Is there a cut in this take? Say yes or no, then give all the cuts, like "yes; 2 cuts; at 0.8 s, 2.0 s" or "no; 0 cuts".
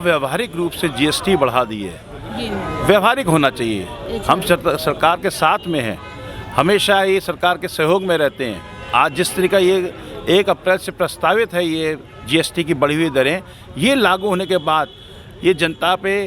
no; 0 cuts